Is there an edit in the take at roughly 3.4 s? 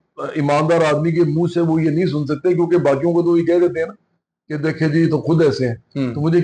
no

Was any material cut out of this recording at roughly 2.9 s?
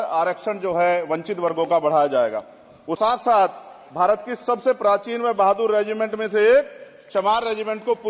yes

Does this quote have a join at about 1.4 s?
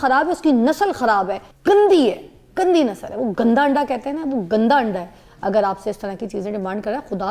yes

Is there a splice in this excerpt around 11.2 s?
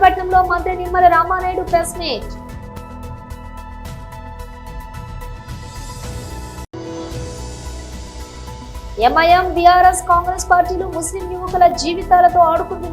no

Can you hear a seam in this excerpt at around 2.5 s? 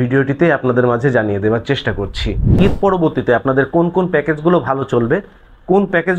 yes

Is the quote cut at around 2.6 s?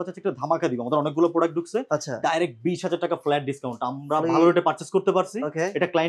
no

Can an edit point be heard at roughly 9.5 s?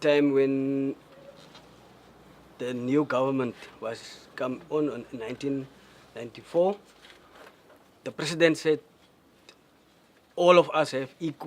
no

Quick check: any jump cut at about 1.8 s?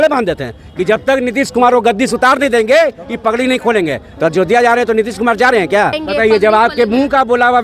no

